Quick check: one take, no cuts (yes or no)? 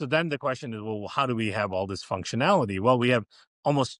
yes